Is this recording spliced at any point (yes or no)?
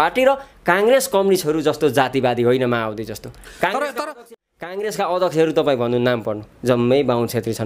yes